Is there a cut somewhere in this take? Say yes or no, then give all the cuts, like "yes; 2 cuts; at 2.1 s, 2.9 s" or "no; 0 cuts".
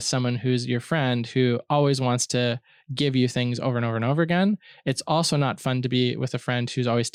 no; 0 cuts